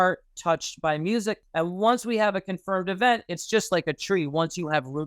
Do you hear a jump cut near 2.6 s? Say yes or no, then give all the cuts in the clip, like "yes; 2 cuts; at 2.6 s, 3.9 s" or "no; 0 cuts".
no; 1 cut; at 1.4 s